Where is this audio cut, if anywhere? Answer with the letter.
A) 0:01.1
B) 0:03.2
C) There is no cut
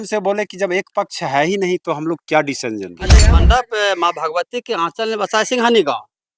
B